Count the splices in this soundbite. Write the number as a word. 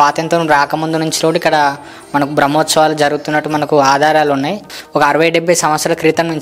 one